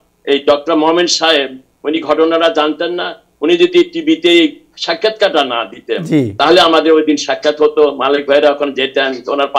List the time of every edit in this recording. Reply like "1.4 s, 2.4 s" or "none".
none